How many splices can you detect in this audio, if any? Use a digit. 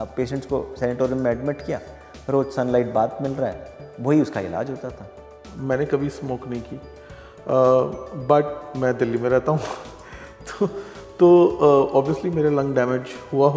1